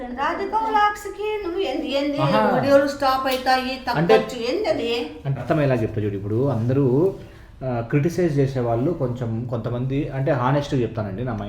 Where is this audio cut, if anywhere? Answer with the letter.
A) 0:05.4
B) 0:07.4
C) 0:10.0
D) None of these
A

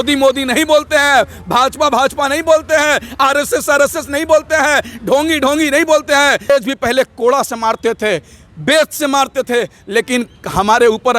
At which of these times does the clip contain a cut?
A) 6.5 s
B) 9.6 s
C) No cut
A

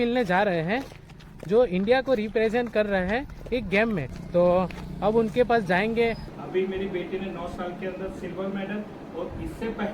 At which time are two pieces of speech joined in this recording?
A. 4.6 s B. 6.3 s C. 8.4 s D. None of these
B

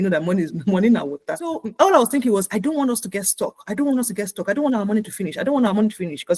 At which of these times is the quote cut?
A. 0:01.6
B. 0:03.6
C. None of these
A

